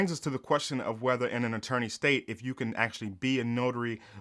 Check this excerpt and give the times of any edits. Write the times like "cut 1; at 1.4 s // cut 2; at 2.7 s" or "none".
none